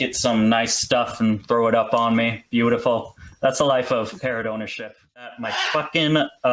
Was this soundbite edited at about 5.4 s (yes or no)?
yes